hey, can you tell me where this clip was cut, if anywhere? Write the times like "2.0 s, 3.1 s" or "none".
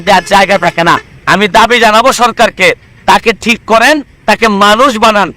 1.1 s